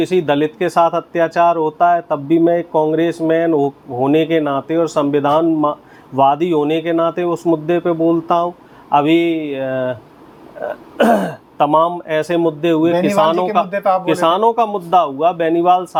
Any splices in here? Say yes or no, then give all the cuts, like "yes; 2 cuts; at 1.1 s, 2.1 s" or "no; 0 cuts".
no; 0 cuts